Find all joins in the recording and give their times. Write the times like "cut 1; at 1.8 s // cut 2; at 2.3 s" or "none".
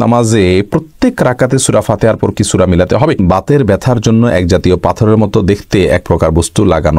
cut 1; at 3.2 s